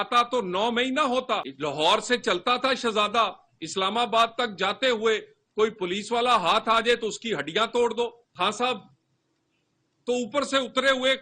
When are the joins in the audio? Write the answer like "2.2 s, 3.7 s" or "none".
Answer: 1.5 s, 8.2 s